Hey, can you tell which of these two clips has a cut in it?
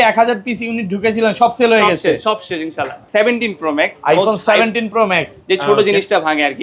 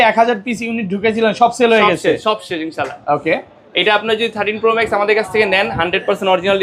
first; 1 cut; at 3.0 s

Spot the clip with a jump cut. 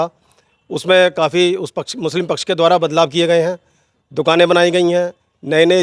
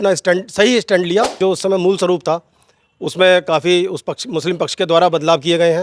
second; 1 cut; at 1.3 s

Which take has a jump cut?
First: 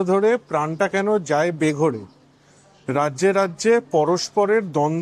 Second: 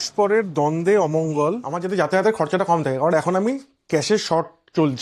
second; 1 cut; at 1.7 s

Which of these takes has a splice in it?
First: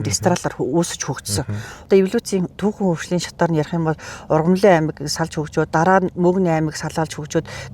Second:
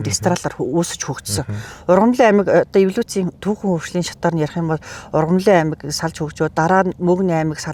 first; 1 cut; at 1.8 s

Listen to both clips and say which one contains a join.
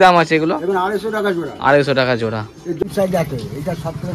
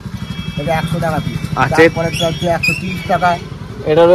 first; 1 cut; at 2.8 s

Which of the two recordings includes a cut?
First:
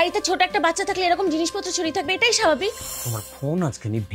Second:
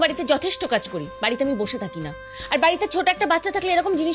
first; 1 cut; at 2.8 s

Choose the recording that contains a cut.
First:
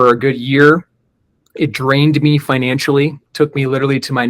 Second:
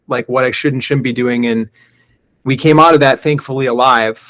first; 1 cut; at 3.3 s

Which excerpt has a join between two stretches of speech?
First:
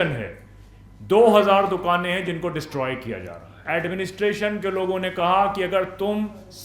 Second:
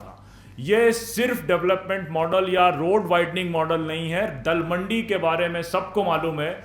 first; 1 cut; at 3.6 s

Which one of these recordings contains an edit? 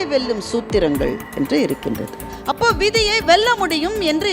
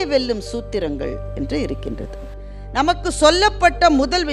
first; 1 cut; at 2.3 s

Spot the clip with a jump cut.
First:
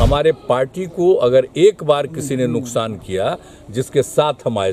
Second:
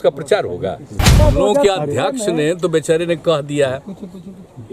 second; 1 cut; at 1.1 s

